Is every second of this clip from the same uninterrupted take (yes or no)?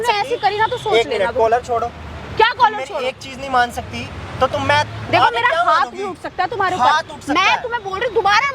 yes